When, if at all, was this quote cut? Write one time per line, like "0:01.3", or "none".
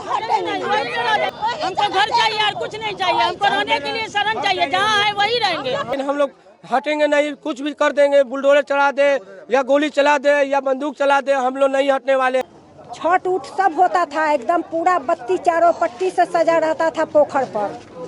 0:01.3
0:05.9
0:12.4